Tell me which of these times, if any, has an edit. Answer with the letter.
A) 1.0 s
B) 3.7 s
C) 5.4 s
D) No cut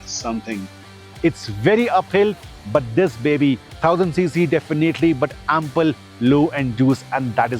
A